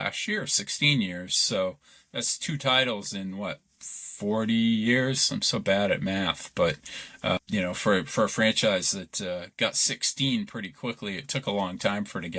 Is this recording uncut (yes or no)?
no